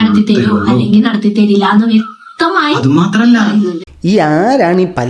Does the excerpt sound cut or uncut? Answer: uncut